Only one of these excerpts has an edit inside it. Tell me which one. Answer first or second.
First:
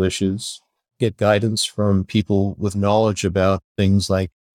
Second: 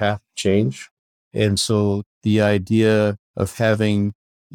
second